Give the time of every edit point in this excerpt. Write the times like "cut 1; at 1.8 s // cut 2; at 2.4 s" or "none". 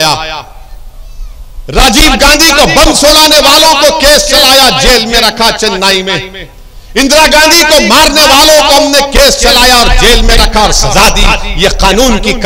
none